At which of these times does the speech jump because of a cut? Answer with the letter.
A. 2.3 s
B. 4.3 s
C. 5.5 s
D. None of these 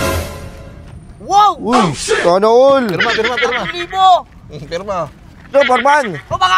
C